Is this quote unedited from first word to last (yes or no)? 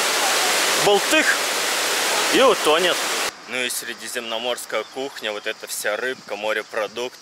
no